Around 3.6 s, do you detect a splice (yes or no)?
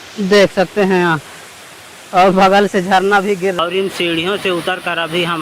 yes